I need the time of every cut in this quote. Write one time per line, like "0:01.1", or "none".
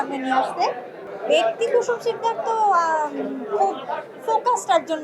0:01.1